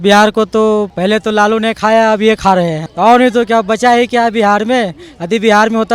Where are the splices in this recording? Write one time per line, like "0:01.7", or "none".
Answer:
0:00.9
0:02.8